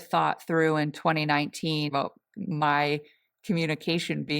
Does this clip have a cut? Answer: yes; 1 cut; at 1.9 s

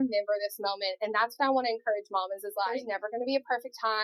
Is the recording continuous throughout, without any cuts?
no; 1 cut; at 2.8 s

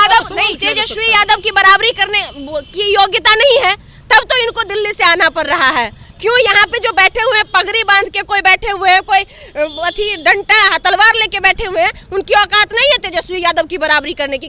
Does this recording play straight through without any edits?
yes; 0 cuts

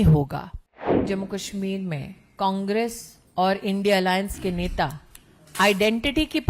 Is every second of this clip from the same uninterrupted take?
no; 1 cut; at 1.0 s

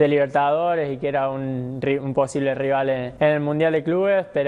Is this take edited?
yes; 1 cut; at 3.1 s

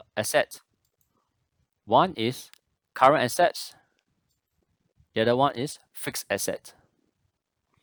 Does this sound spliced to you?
no; 0 cuts

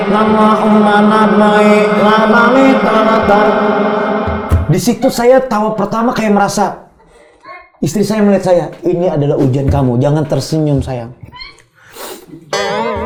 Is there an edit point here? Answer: no; 0 cuts

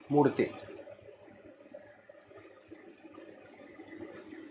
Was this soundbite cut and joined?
no; 0 cuts

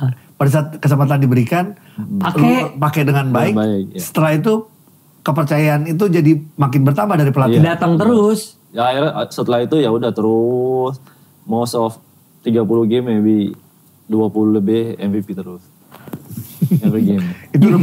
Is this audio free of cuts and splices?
yes; 0 cuts

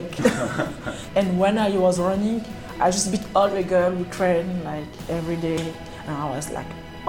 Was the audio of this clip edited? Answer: yes; 1 cut; at 1.0 s

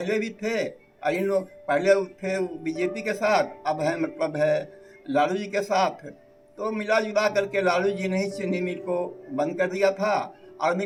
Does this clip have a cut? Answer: no; 0 cuts

